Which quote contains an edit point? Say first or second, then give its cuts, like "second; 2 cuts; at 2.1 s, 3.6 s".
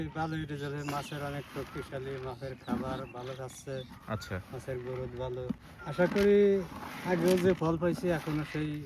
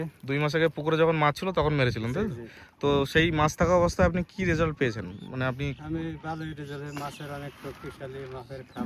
first; 1 cut; at 5.8 s